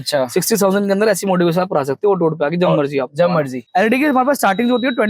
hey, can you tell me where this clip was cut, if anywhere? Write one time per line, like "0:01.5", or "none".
0:03.6